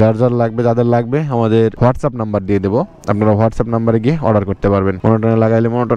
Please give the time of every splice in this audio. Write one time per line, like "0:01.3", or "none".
0:01.8
0:05.0